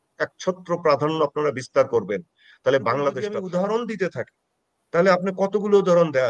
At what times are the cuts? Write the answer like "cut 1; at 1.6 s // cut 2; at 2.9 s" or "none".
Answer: cut 1; at 3.4 s